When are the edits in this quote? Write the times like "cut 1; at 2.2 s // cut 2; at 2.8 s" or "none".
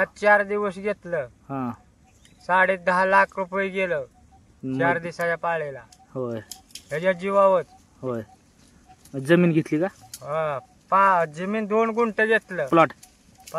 none